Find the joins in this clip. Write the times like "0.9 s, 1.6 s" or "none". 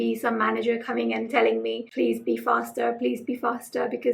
1.8 s